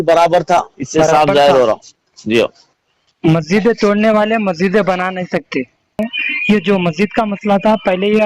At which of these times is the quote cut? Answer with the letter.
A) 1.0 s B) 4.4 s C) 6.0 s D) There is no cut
C